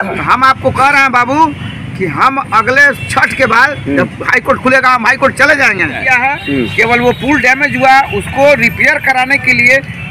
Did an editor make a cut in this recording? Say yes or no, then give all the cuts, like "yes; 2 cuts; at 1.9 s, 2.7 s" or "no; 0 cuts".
yes; 1 cut; at 6.0 s